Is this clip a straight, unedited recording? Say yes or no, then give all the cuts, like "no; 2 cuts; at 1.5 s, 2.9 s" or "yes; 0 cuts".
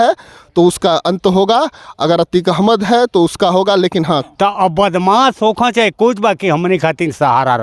no; 1 cut; at 4.2 s